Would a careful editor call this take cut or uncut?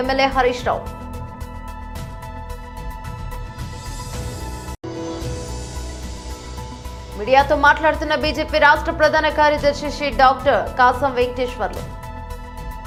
uncut